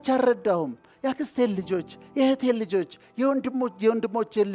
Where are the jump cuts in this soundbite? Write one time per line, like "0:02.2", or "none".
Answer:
none